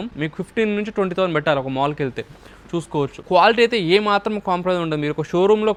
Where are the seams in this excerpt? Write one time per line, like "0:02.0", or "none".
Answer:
none